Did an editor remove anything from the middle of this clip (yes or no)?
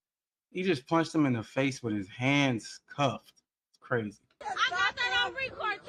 no